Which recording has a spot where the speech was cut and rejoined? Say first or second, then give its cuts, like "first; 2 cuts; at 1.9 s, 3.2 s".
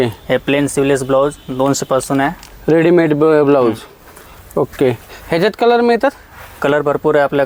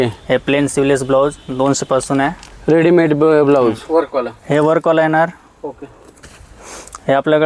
second; 1 cut; at 3.8 s